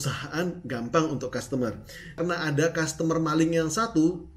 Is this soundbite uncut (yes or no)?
no